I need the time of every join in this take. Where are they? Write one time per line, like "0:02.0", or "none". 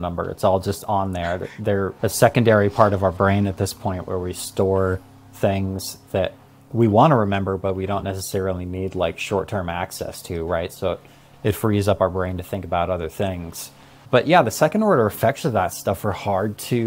none